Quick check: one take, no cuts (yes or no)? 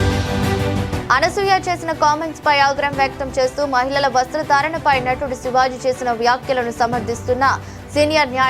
no